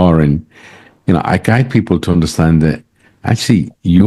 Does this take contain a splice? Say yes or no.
no